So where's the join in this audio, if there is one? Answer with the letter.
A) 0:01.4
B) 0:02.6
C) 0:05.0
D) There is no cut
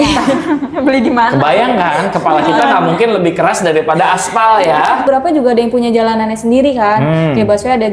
C